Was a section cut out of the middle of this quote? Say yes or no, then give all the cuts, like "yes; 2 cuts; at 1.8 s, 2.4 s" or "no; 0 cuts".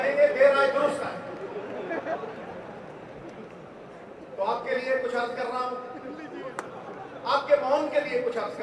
no; 0 cuts